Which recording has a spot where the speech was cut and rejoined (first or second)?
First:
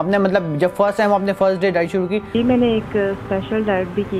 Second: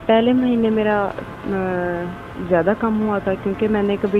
first